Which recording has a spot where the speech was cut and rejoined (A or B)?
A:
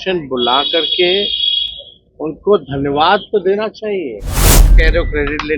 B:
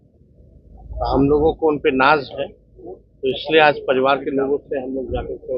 A